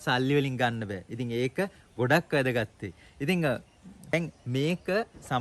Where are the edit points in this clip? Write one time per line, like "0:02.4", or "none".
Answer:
none